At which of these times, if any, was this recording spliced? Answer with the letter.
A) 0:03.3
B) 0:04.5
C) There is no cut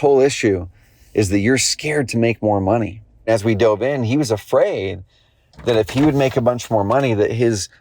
A